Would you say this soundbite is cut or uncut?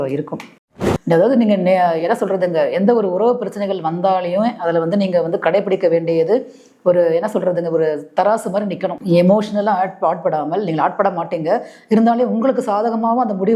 cut